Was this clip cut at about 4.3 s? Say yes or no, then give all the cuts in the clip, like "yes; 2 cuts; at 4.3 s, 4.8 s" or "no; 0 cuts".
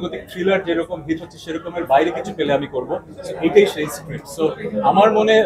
no; 0 cuts